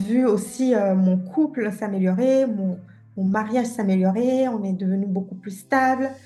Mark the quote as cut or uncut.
uncut